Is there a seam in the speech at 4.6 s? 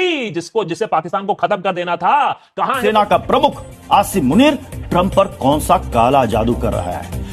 no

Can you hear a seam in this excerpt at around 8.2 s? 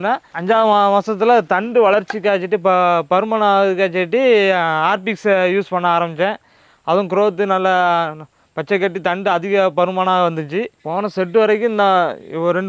no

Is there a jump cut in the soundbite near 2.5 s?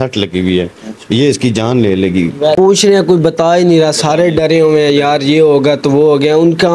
yes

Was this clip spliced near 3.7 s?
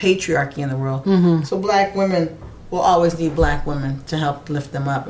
no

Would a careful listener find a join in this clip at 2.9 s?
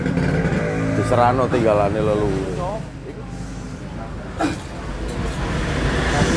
yes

